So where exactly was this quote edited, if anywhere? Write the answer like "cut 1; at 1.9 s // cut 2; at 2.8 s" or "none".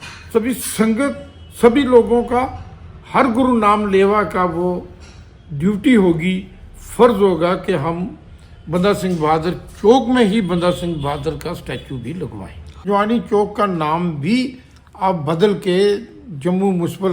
cut 1; at 12.8 s